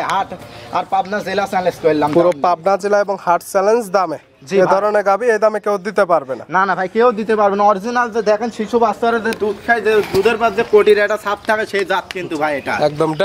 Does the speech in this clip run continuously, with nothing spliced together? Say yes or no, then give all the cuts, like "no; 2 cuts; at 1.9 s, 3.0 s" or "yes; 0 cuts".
yes; 0 cuts